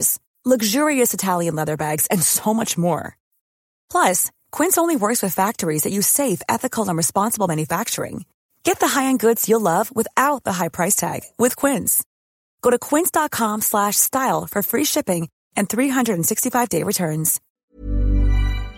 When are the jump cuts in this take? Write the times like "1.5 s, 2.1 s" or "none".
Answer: 17.7 s

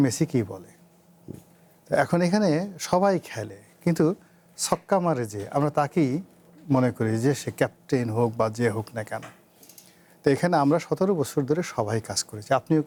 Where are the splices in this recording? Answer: none

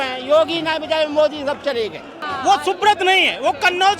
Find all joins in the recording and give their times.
2.2 s

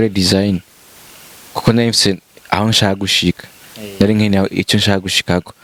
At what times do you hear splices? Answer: none

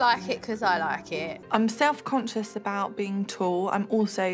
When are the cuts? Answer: 1.4 s

